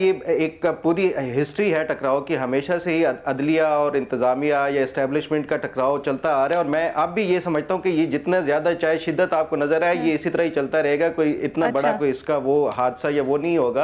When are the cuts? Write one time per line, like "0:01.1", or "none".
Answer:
none